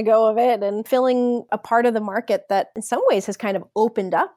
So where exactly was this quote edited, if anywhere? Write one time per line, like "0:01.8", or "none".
0:01.3
0:02.8